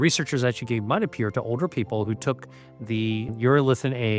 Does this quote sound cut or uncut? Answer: cut